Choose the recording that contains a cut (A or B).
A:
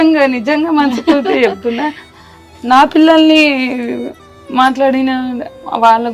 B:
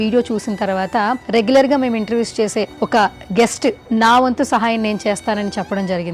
B